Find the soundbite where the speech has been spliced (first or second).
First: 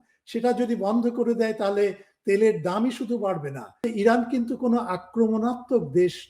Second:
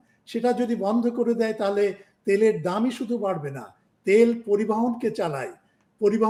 first